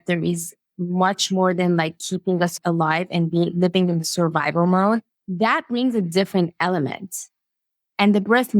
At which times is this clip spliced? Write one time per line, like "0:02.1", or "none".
0:02.6